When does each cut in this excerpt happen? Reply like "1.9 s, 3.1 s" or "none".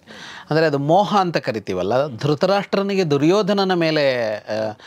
none